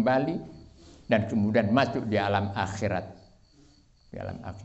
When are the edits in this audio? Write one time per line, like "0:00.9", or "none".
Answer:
none